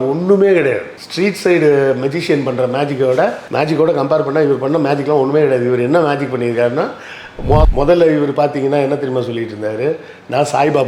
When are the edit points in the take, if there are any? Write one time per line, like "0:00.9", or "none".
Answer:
0:07.6

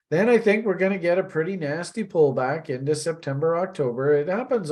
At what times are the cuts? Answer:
none

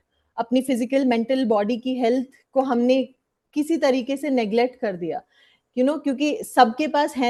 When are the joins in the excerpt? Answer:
none

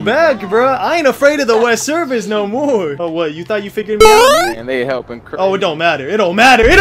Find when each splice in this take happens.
0:03.0

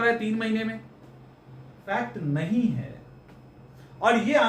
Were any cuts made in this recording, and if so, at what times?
0:01.8

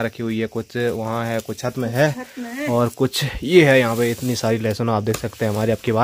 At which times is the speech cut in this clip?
none

